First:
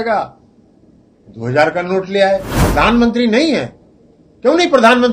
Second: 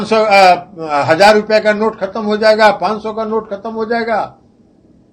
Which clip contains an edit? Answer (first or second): first